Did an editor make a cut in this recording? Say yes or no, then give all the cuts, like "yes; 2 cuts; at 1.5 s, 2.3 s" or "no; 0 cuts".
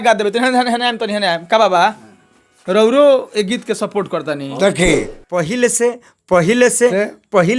yes; 1 cut; at 5.2 s